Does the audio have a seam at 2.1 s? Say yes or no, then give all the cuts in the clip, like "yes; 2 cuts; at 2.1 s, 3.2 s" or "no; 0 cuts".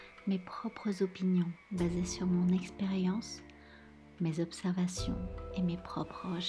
no; 0 cuts